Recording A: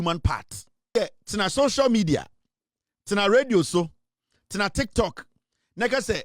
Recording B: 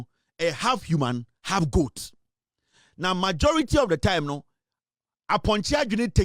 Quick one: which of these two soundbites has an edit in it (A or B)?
A